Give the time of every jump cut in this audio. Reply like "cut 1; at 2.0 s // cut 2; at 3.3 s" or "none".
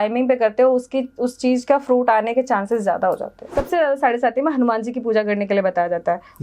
cut 1; at 3.4 s